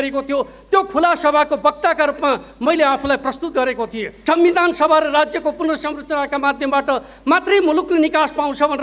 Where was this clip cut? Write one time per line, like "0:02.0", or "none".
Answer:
0:04.1